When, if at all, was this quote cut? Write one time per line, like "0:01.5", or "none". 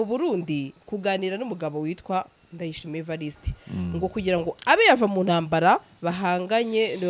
none